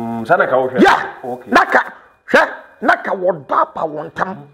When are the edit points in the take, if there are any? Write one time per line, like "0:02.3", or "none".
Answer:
none